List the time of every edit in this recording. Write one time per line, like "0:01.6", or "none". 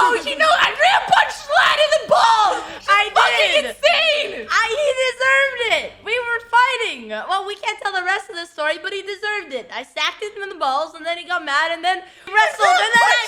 0:12.2